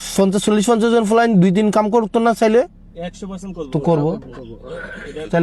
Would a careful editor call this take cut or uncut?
uncut